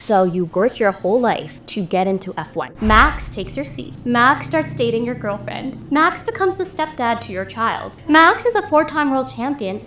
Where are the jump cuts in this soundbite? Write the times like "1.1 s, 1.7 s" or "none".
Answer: 1.6 s, 2.6 s, 3.8 s, 5.8 s, 7.9 s